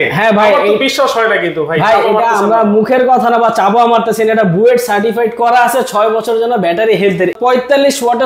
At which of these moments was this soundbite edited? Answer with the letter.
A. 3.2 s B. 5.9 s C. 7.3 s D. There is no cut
C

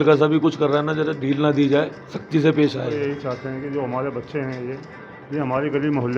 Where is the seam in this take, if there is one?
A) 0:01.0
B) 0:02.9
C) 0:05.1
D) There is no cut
B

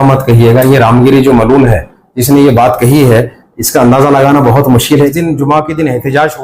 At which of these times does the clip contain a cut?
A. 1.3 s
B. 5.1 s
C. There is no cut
B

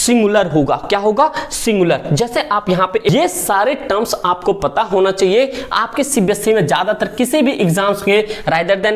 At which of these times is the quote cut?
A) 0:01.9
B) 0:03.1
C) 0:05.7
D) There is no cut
B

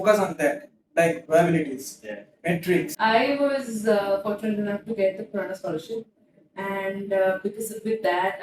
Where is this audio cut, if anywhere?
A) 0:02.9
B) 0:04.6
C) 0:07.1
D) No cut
A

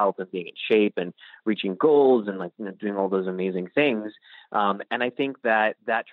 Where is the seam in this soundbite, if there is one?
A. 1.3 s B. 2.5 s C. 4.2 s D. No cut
D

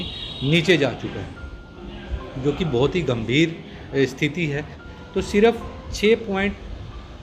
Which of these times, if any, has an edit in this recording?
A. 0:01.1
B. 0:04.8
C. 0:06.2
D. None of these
B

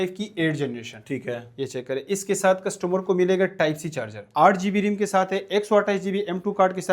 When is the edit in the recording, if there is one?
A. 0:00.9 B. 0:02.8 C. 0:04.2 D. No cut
C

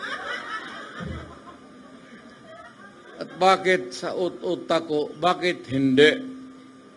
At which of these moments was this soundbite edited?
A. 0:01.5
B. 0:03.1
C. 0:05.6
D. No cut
D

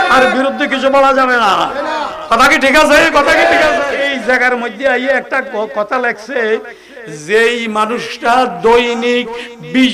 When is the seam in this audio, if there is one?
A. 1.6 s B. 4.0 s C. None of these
B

